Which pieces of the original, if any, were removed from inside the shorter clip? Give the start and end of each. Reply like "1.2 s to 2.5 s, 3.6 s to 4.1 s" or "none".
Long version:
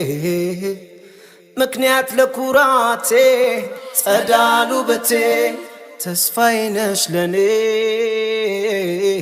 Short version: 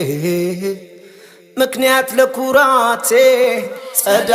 none